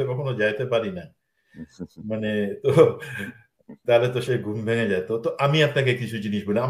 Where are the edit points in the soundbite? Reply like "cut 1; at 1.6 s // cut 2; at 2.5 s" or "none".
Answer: none

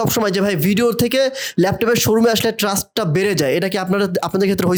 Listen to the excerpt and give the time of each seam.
none

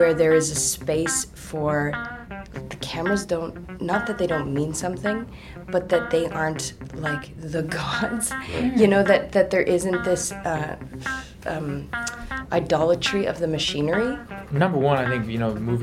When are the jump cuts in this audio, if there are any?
cut 1; at 14.3 s

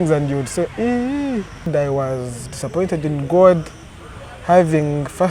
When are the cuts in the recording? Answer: cut 1; at 1.7 s

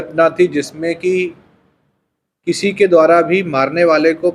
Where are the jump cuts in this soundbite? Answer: none

